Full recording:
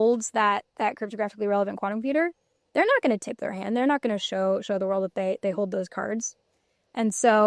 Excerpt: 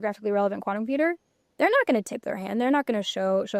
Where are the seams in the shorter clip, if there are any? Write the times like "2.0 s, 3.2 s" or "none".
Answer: none

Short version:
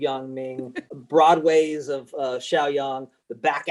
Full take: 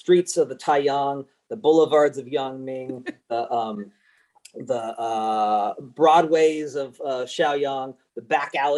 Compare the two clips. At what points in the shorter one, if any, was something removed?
0.9 s

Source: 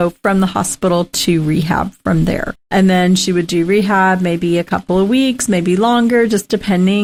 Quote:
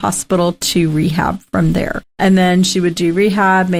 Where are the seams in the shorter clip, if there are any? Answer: none

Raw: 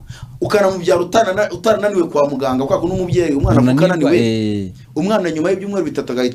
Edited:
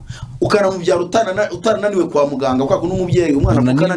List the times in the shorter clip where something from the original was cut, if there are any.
none

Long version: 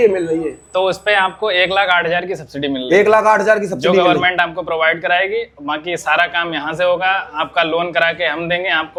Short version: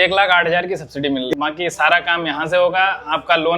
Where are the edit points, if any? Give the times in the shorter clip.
1.3 s

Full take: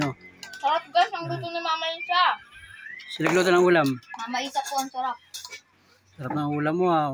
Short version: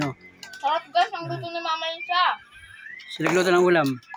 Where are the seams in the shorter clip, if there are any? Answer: none

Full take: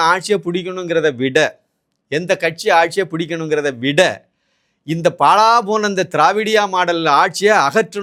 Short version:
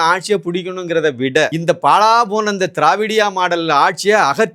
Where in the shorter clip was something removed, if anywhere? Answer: 1.6 s

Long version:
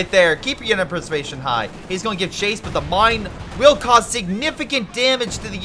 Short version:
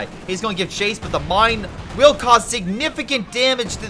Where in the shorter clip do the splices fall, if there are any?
none

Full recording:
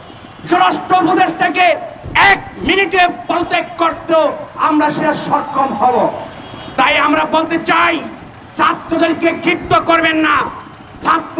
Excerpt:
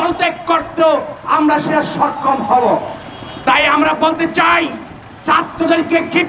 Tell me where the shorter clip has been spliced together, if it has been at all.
none

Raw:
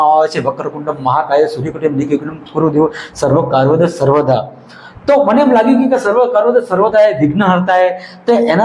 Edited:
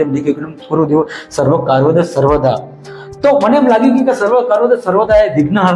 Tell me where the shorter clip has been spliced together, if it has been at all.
none

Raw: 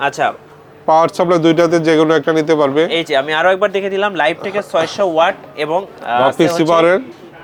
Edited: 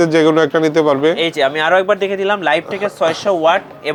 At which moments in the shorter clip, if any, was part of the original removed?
none

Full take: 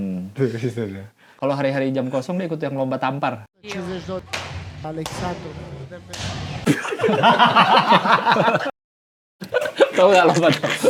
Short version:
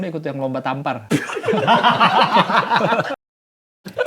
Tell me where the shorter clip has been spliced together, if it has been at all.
1.0 s

